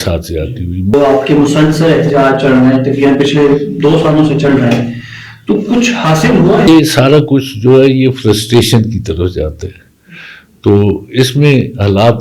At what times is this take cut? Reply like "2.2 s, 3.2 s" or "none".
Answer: 0.9 s, 6.7 s